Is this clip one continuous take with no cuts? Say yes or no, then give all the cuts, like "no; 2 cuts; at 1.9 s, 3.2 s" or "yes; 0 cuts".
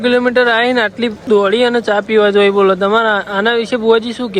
no; 1 cut; at 1.2 s